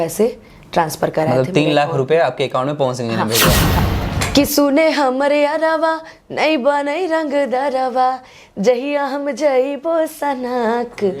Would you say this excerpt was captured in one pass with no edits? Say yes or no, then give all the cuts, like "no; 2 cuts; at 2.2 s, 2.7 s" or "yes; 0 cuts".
no; 1 cut; at 3.7 s